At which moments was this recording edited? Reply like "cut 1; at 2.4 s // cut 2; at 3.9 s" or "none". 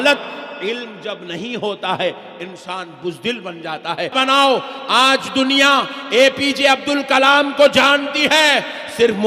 cut 1; at 4.1 s